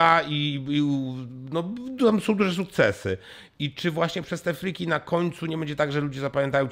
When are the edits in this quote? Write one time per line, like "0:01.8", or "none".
none